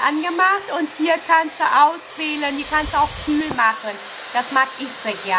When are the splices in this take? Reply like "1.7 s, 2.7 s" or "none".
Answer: none